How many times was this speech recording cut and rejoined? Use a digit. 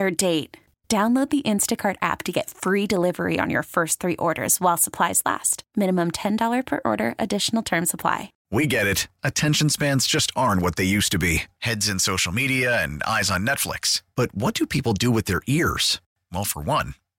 1